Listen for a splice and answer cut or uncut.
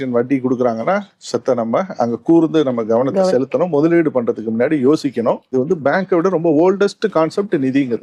cut